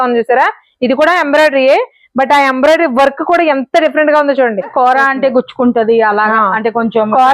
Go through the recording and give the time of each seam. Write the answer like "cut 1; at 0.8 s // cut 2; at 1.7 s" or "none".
cut 1; at 4.7 s